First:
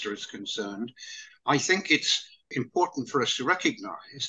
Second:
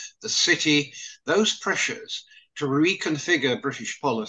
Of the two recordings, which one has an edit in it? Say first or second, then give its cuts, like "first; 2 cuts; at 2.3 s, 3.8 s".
first; 1 cut; at 2.6 s